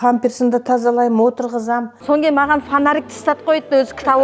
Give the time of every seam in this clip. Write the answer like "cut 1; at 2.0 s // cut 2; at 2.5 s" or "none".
cut 1; at 1.9 s